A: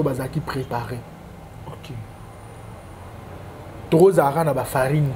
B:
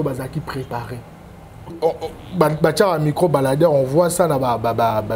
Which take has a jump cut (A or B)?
B